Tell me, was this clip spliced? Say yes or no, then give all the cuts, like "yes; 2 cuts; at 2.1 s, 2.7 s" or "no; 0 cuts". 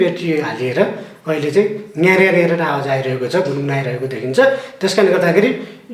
no; 0 cuts